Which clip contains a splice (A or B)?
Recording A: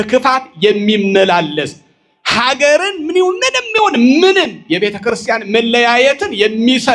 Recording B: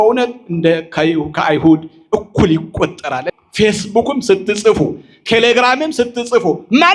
B